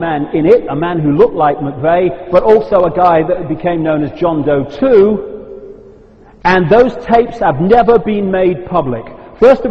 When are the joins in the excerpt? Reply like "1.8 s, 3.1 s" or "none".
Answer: 3.4 s